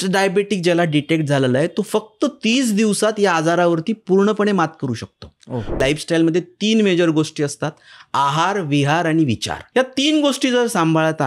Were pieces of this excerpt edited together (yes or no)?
yes